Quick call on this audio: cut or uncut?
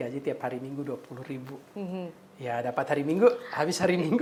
uncut